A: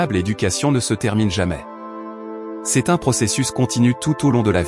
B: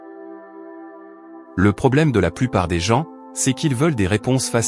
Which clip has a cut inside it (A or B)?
B